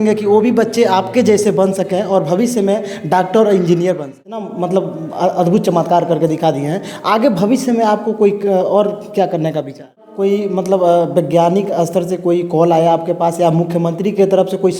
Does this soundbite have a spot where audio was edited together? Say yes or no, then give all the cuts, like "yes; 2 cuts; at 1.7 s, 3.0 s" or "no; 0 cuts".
yes; 2 cuts; at 4.5 s, 10.1 s